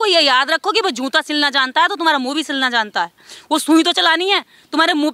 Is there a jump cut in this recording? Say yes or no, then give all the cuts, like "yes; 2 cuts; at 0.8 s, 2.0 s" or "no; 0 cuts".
no; 0 cuts